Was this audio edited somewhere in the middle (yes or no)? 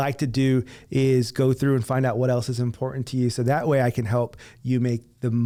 no